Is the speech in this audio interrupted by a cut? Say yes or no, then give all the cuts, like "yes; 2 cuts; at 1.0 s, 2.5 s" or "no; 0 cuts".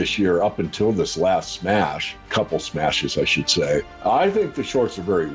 yes; 2 cuts; at 2.3 s, 3.9 s